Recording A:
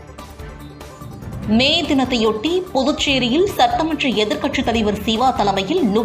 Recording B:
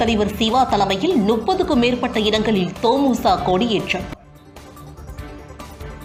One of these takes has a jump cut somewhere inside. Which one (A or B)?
A